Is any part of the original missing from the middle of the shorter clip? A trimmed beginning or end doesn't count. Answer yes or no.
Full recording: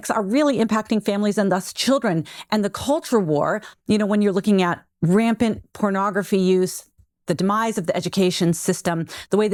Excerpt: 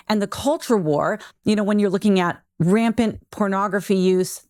no